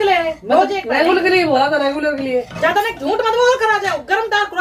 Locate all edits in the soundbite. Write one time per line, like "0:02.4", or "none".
none